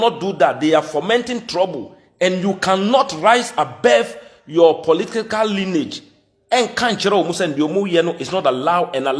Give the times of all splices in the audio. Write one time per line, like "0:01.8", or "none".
none